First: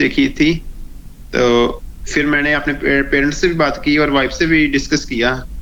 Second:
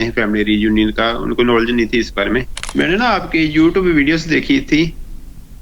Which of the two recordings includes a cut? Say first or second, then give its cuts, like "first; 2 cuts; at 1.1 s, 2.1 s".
second; 1 cut; at 2.6 s